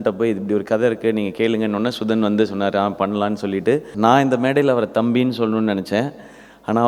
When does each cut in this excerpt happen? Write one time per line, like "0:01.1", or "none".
0:03.9